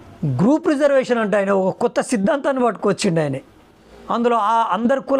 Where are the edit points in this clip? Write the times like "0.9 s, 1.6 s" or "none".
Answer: 3.9 s